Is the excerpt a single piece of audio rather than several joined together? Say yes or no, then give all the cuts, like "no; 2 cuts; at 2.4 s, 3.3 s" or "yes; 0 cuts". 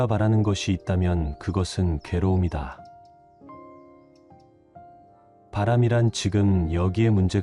yes; 0 cuts